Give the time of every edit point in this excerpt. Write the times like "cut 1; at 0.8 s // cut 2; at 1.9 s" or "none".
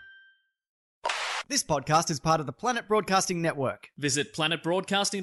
cut 1; at 1.0 s